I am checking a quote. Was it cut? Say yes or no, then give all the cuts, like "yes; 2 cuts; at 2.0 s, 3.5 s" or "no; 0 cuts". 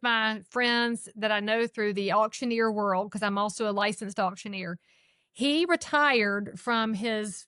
no; 0 cuts